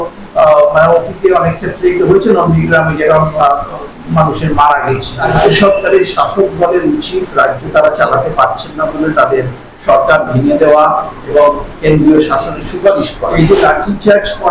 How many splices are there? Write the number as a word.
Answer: two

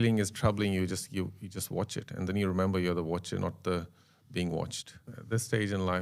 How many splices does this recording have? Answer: one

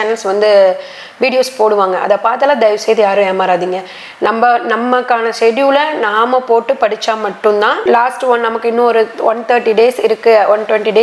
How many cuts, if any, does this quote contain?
one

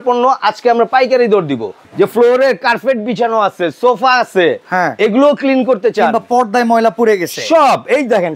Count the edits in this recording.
one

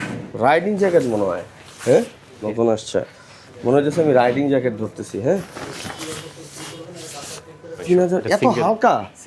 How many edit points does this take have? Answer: two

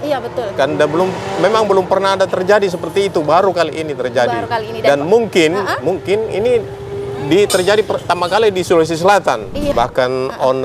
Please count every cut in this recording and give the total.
one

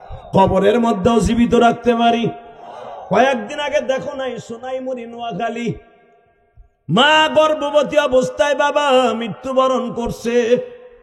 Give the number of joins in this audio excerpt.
zero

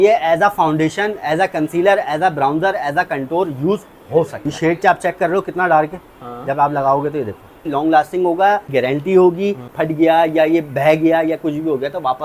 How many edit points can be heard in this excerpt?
four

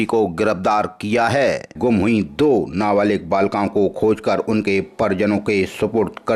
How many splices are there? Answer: one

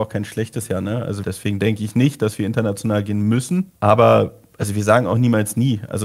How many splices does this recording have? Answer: two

